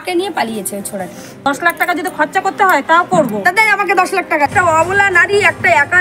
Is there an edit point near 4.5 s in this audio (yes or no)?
yes